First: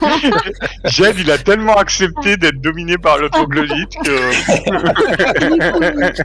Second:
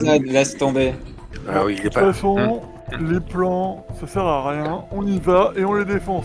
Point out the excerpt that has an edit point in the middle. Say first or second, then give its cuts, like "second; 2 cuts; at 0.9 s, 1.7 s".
second; 1 cut; at 1.4 s